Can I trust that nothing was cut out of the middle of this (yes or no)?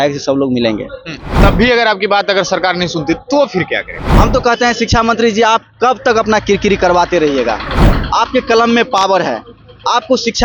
no